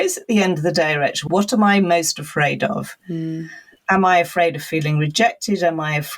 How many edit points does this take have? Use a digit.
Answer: 1